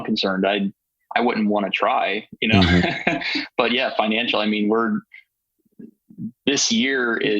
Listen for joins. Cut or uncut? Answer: uncut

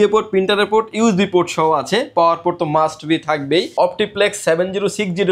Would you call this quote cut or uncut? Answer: cut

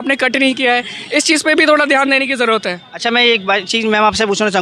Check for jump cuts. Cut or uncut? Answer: uncut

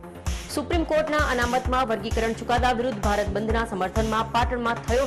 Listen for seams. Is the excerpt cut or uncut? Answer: uncut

